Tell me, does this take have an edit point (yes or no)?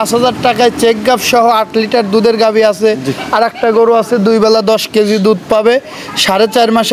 no